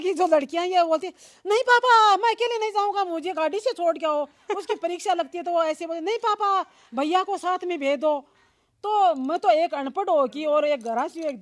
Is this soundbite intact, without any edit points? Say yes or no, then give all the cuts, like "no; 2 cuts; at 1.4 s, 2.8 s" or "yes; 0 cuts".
yes; 0 cuts